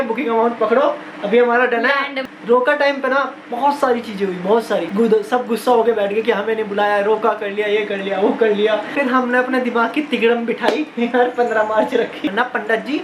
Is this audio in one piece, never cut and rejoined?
no; 4 cuts; at 2.2 s, 4.9 s, 8.9 s, 12.2 s

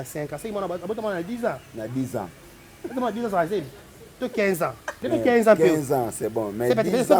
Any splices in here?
yes; 1 cut; at 4.9 s

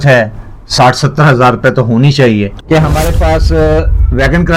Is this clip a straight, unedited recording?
no; 1 cut; at 2.5 s

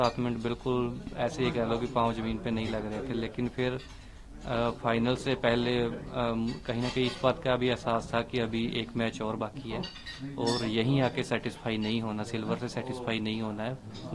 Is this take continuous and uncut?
yes; 0 cuts

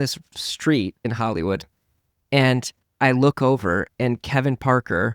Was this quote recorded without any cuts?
no; 1 cut; at 1.0 s

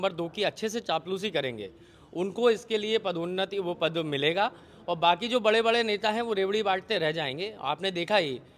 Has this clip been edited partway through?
no; 0 cuts

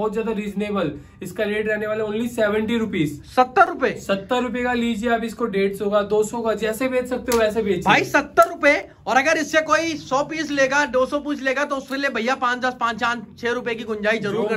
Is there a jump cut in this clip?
no; 0 cuts

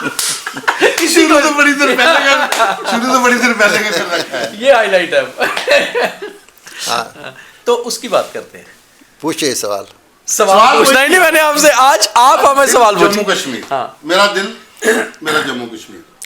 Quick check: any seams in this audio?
no; 0 cuts

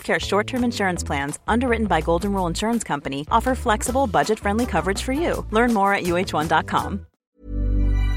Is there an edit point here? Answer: yes; 1 cut; at 7.1 s

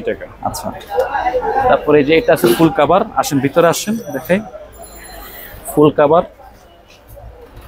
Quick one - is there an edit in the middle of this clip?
no; 0 cuts

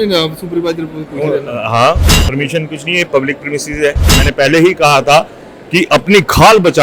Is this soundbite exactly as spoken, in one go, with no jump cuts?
no; 1 cut; at 4.2 s

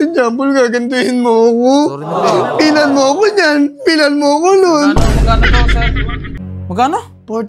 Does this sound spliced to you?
yes; 1 cut; at 6.4 s

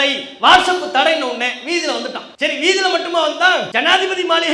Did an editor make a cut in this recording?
yes; 2 cuts; at 2.3 s, 3.7 s

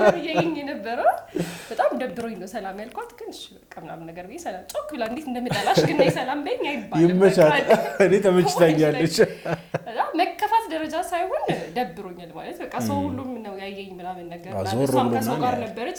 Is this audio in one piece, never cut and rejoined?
yes; 0 cuts

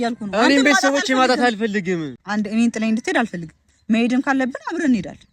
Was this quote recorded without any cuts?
no; 1 cut; at 2.2 s

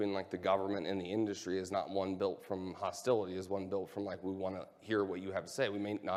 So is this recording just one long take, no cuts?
yes; 0 cuts

